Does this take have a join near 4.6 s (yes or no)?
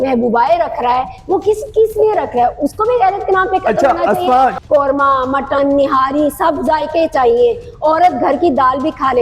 yes